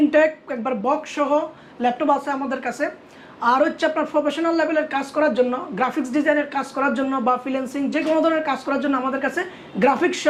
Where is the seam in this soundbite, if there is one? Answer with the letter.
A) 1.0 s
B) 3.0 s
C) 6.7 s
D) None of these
D